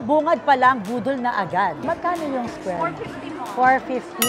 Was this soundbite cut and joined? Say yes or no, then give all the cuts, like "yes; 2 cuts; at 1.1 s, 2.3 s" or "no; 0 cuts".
yes; 1 cut; at 1.8 s